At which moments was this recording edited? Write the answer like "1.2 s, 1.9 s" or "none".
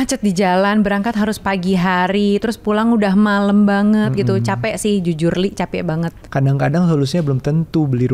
6.2 s